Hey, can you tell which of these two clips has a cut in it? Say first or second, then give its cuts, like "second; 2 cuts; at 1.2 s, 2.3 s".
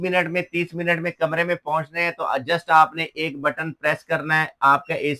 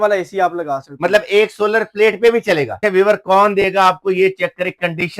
second; 1 cut; at 2.7 s